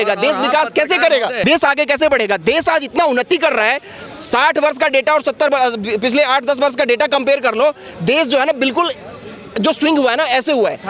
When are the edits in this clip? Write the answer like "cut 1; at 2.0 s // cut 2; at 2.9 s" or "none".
cut 1; at 1.4 s